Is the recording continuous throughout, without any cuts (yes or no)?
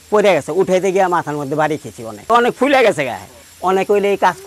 no